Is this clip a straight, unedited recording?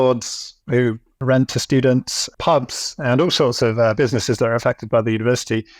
no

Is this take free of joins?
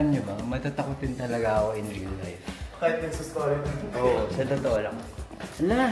yes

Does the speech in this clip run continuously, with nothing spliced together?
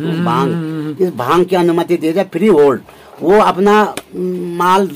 yes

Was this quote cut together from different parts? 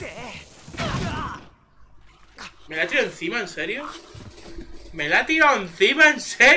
no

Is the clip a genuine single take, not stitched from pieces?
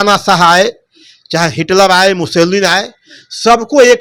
yes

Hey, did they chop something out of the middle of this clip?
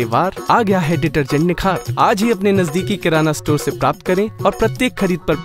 no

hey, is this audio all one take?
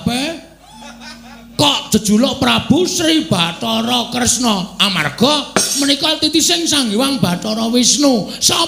yes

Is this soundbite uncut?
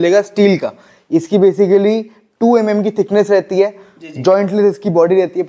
yes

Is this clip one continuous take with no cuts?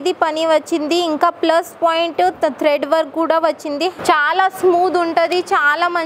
no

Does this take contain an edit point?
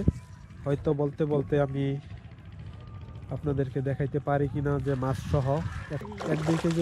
yes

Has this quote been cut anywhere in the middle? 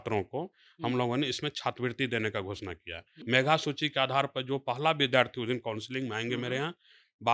yes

